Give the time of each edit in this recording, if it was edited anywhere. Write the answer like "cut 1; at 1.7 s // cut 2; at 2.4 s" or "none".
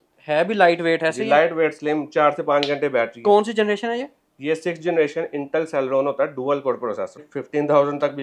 cut 1; at 7.3 s